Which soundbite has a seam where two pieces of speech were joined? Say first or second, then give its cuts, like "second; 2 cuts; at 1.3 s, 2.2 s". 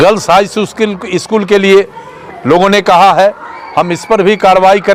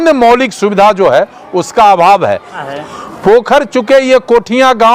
second; 1 cut; at 2.6 s